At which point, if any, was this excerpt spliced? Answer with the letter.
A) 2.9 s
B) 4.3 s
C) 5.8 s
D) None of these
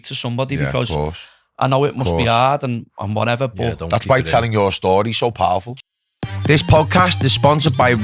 C